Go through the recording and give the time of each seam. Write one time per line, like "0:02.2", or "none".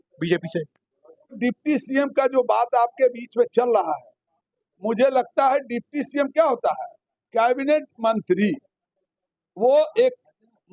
0:01.4